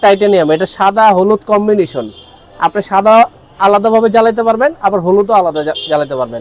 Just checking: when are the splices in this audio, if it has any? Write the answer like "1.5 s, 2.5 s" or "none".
none